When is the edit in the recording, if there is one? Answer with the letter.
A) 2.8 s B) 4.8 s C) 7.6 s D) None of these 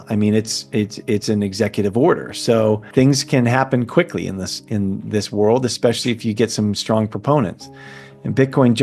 A